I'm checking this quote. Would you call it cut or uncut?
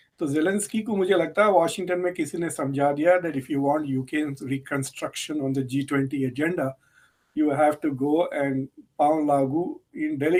uncut